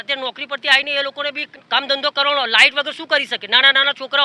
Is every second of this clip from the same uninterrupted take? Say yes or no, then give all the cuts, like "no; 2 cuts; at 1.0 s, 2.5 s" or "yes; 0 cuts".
no; 1 cut; at 1.5 s